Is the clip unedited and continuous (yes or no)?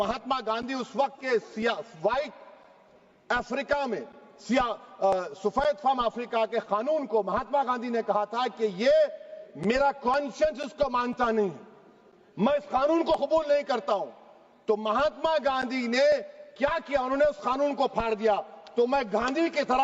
yes